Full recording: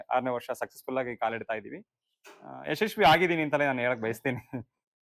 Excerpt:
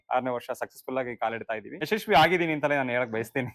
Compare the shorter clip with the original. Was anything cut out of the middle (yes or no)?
yes